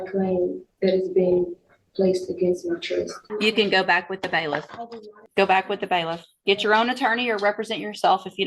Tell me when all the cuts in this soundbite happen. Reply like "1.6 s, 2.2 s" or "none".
3.2 s, 5.2 s